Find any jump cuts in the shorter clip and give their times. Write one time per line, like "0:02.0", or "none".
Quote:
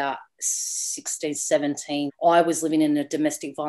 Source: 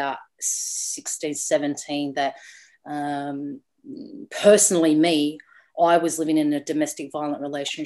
0:02.1

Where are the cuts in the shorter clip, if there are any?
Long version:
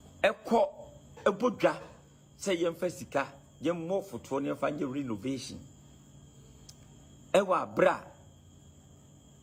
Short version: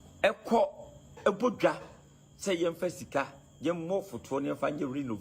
none

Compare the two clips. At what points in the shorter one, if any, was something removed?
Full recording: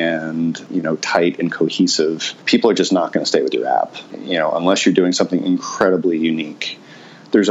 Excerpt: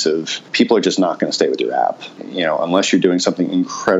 none

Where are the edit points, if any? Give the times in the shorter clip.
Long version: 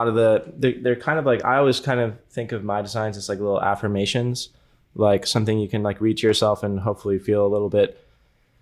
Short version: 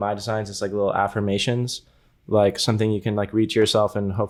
none

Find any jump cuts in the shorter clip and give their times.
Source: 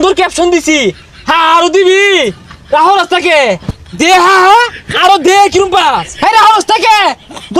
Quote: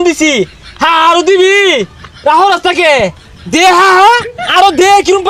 none

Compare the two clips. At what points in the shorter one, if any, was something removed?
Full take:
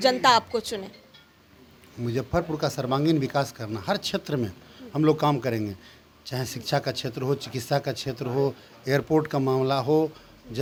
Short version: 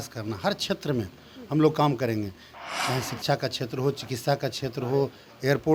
none

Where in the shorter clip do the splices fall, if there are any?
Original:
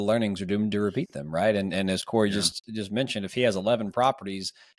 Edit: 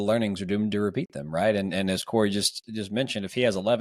none

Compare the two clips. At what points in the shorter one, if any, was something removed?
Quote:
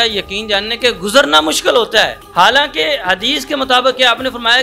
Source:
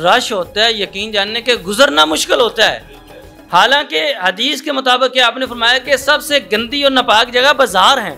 0:02.2

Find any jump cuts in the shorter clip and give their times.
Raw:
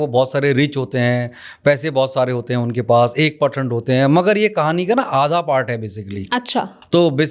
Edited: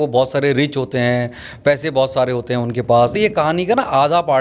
0:03.2

